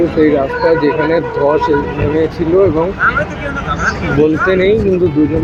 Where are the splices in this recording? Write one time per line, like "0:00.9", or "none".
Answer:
none